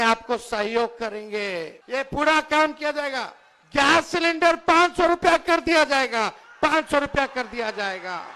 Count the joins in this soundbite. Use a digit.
1